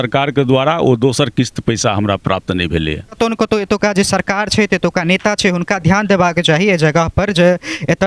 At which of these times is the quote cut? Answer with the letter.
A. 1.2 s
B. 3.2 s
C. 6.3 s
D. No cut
B